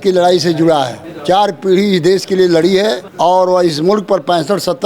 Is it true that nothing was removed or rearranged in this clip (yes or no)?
no